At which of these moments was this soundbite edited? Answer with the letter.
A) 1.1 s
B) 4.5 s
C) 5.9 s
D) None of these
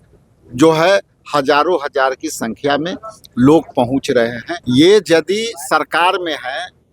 B